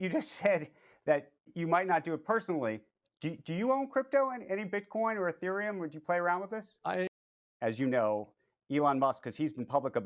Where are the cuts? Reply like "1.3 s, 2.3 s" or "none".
7.2 s